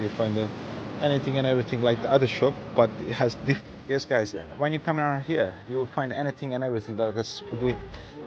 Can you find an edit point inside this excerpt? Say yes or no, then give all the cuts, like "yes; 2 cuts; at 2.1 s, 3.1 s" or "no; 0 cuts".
yes; 2 cuts; at 3.6 s, 7.5 s